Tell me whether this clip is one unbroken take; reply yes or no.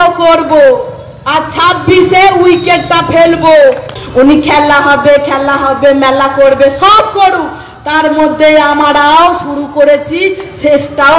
no